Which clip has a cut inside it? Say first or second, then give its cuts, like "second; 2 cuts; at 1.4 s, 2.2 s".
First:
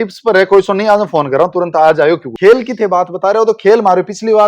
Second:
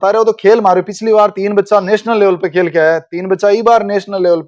first; 1 cut; at 2.3 s